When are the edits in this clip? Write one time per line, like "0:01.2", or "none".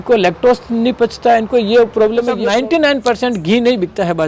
0:02.4